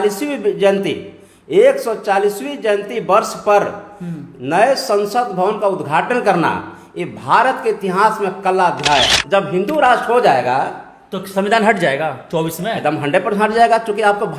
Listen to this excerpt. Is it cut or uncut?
cut